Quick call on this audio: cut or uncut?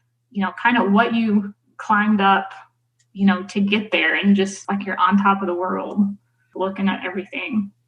cut